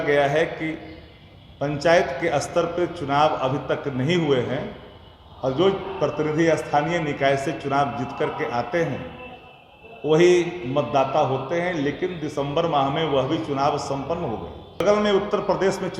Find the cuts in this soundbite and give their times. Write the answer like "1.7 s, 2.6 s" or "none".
14.8 s